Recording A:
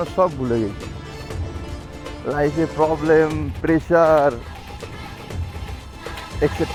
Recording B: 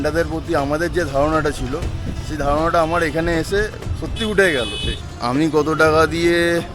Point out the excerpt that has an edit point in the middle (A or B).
B